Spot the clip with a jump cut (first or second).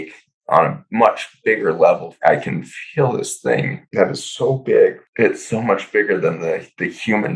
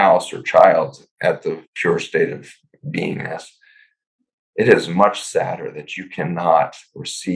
first